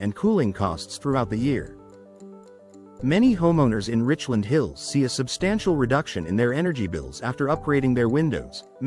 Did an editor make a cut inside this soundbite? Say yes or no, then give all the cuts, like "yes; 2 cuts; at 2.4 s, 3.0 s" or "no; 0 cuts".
no; 0 cuts